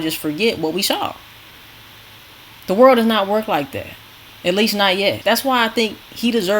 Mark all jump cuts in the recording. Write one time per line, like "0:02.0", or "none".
0:05.2